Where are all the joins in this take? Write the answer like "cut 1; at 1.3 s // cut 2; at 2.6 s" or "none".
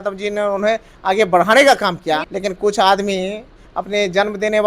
cut 1; at 2.3 s